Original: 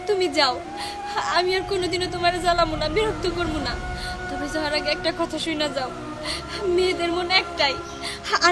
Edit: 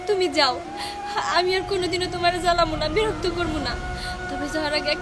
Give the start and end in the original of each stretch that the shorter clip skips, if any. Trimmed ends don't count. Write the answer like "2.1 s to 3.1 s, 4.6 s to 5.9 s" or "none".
none